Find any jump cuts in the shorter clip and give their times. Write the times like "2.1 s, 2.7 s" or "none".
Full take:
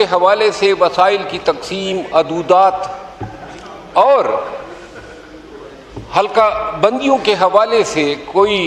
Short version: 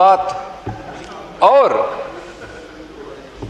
none

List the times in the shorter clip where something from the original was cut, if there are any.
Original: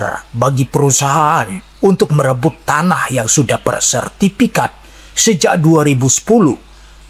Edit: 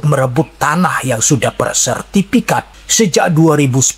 2.8 s

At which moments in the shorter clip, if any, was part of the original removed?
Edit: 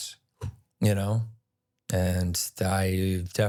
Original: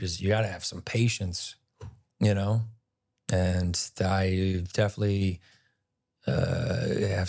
none

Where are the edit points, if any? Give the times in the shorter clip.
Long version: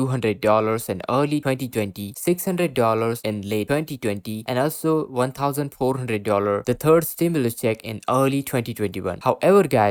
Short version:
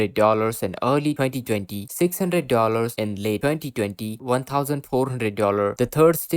4.2 s

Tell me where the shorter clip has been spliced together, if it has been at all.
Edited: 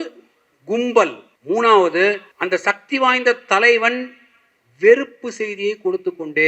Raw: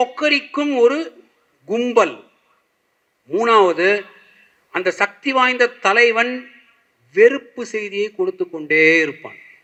1.3 s, 2.3 s

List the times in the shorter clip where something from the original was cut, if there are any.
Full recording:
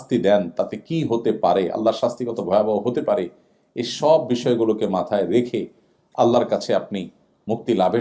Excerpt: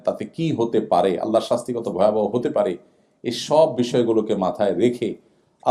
none

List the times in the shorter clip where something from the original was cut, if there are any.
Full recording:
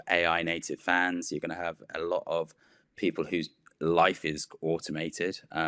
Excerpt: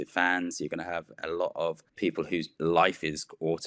2.3 s

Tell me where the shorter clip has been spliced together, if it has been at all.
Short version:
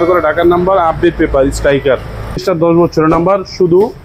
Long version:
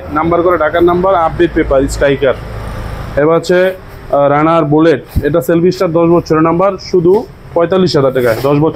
2.4 s

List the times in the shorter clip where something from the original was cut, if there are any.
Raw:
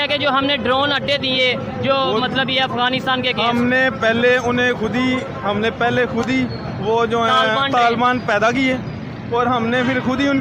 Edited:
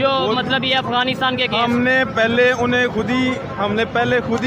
none

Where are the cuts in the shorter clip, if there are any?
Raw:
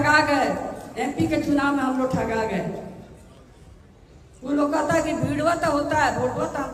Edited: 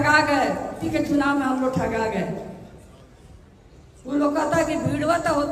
0.9 s

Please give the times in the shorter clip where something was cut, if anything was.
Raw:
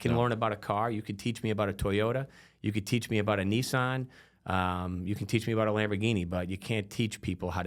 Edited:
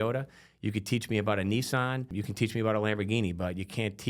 2.1 s

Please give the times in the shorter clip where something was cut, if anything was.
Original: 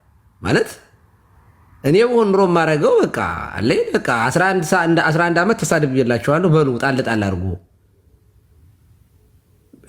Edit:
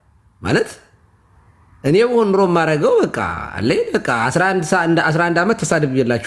none

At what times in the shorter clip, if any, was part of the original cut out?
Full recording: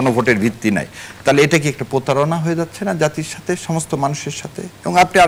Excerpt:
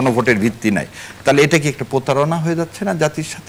none

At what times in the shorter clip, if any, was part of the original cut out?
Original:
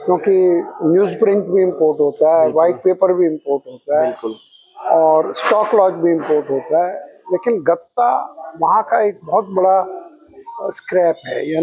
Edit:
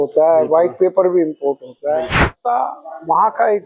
2.3 s

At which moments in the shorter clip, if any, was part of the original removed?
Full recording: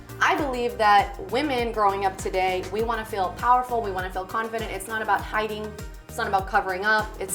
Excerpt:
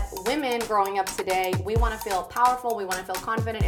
none

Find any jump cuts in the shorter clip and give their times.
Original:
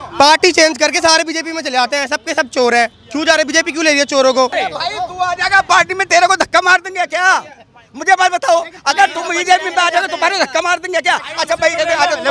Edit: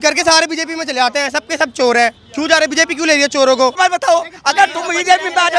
3.8 s

